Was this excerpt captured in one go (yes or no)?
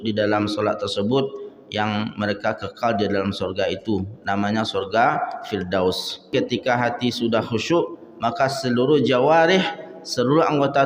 no